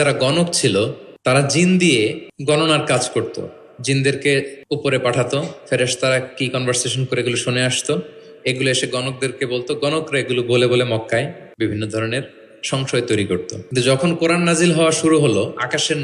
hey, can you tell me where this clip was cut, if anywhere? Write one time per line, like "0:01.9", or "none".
0:01.1
0:02.3
0:04.6
0:11.4
0:13.6